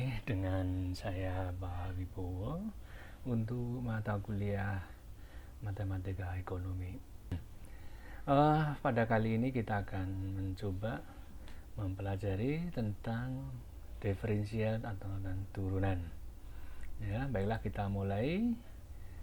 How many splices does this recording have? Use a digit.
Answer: 1